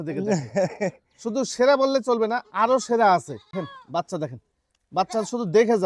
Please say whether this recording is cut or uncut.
cut